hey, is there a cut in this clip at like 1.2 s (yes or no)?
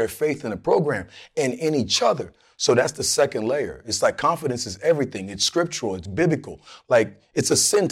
no